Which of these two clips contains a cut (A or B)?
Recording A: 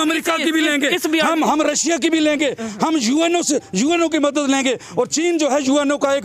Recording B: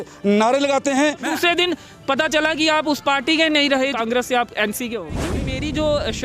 B